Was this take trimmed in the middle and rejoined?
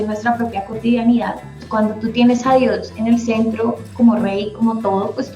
yes; 1 cut; at 1.6 s

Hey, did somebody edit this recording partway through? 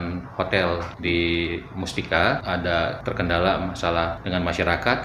yes; 3 cuts; at 0.9 s, 2.8 s, 4.2 s

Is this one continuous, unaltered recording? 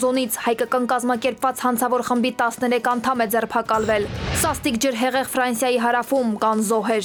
yes; 0 cuts

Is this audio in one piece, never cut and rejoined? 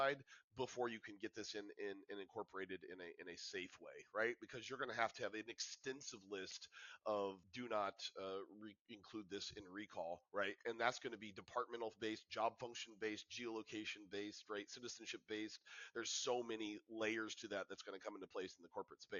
yes; 0 cuts

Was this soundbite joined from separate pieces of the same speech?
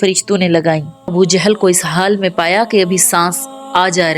yes; 1 cut; at 1.1 s

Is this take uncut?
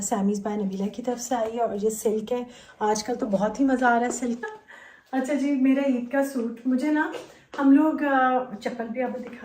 no; 1 cut; at 4.4 s

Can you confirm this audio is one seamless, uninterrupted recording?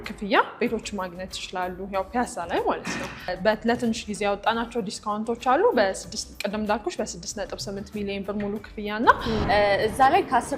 no; 2 cuts; at 3.3 s, 9.4 s

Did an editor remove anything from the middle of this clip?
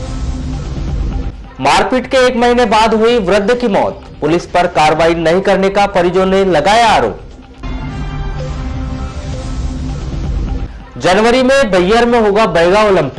yes; 1 cut; at 1.1 s

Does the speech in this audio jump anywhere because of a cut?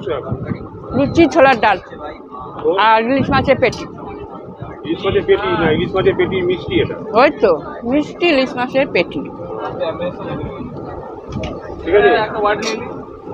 no; 0 cuts

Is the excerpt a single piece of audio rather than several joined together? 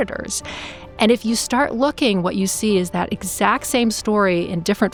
yes; 0 cuts

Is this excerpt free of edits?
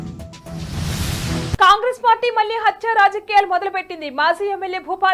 no; 1 cut; at 1.5 s

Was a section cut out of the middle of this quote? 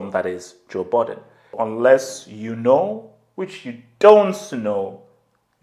yes; 1 cut; at 1.5 s

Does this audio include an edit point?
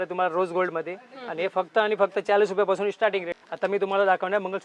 yes; 1 cut; at 3.3 s

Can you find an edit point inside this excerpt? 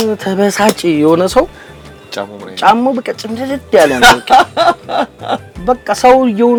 no; 0 cuts

